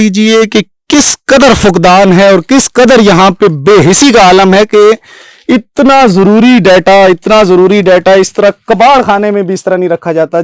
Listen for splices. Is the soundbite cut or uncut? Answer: uncut